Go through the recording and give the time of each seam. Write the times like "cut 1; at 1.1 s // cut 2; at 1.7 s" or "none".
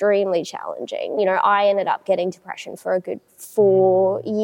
cut 1; at 1.2 s